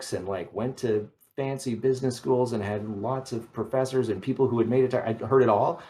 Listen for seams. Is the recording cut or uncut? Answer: uncut